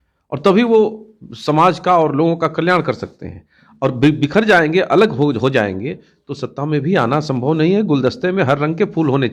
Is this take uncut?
yes; 0 cuts

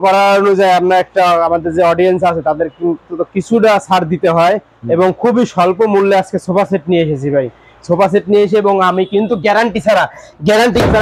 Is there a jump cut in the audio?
no; 0 cuts

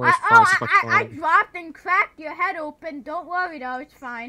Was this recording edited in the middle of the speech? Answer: no; 0 cuts

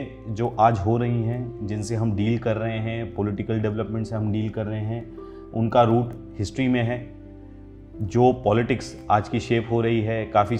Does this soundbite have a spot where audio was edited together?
no; 0 cuts

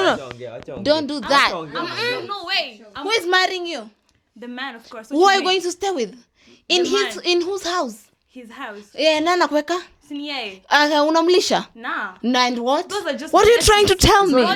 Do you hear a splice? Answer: no; 0 cuts

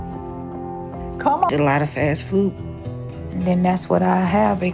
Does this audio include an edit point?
no; 0 cuts

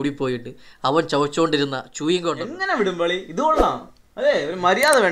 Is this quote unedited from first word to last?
no; 1 cut; at 2.5 s

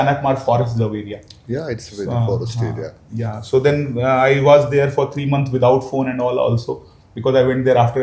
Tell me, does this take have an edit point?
no; 0 cuts

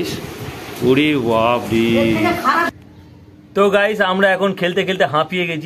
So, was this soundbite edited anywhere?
yes; 1 cut; at 2.7 s

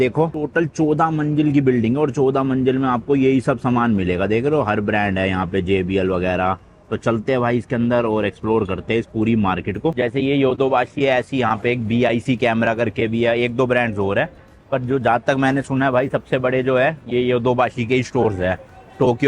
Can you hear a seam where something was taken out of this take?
no; 0 cuts

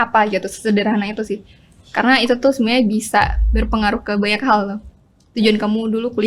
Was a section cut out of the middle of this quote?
no; 0 cuts

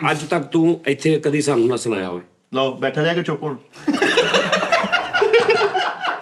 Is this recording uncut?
yes; 0 cuts

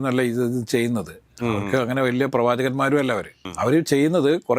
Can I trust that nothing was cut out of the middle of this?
no; 1 cut; at 3.4 s

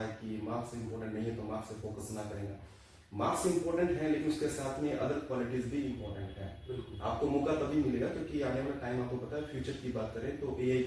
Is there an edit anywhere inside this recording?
no; 0 cuts

